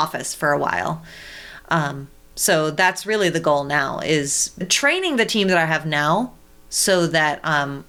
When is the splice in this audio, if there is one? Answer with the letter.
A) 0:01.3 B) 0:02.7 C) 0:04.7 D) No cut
C